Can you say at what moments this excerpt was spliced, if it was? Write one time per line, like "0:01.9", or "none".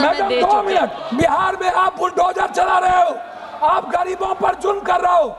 0:01.0